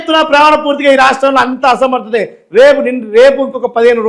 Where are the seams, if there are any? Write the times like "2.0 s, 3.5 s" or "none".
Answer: none